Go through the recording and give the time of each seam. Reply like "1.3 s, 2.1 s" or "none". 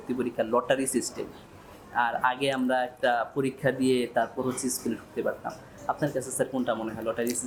none